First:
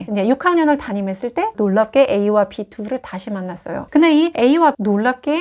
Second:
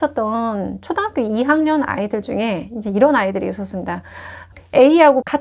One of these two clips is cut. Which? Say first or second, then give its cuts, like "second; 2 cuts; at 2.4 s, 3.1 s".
second; 1 cut; at 4.5 s